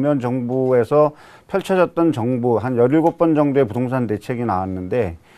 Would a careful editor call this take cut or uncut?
cut